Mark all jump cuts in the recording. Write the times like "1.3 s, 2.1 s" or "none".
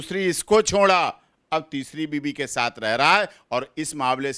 none